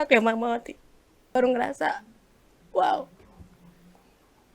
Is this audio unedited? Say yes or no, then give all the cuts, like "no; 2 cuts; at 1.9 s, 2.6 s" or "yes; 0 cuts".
no; 1 cut; at 1.3 s